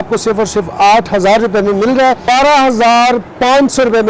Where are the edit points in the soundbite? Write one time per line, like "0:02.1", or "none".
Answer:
0:02.2